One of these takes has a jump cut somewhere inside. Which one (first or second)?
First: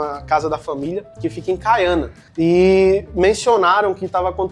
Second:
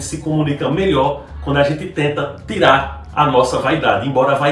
first